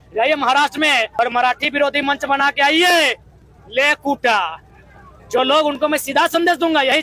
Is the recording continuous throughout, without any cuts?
no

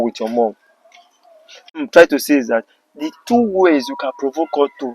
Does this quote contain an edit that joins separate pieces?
yes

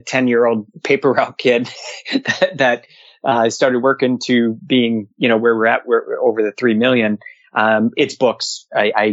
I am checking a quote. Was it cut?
no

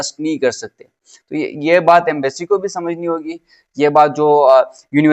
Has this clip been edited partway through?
no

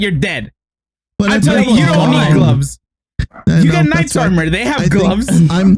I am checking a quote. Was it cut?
no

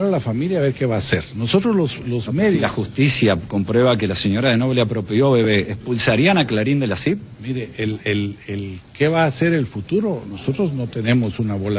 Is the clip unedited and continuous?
yes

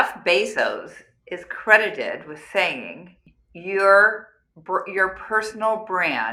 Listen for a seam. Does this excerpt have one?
no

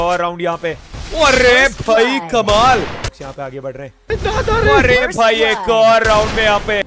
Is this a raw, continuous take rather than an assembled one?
no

